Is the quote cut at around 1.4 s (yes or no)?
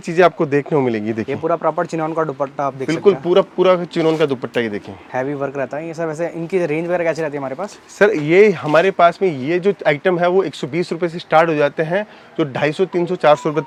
no